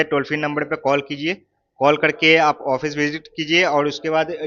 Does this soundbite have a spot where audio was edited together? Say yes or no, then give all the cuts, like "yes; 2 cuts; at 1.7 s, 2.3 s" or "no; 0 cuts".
no; 0 cuts